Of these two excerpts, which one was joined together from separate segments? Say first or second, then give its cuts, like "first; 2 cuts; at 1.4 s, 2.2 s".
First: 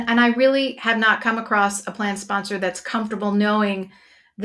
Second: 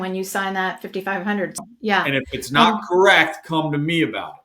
second; 1 cut; at 1.6 s